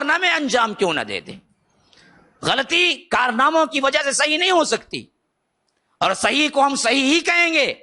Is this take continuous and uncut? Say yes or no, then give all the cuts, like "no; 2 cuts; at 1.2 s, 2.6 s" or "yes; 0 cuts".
yes; 0 cuts